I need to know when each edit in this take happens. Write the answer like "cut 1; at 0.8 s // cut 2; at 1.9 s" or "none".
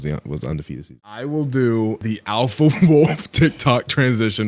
cut 1; at 0.9 s